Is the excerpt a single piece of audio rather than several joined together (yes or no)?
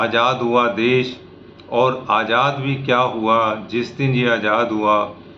yes